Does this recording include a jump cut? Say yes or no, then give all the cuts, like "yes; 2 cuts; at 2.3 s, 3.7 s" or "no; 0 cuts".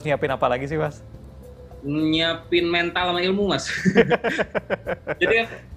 no; 0 cuts